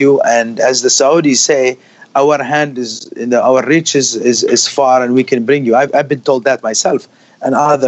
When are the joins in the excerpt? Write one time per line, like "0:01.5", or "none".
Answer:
none